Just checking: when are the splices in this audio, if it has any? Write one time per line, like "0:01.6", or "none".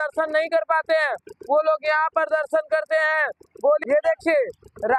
0:03.8